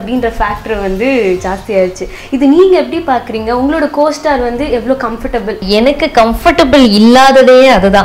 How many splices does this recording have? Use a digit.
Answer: 1